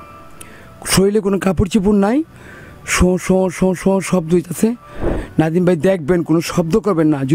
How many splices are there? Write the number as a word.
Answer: one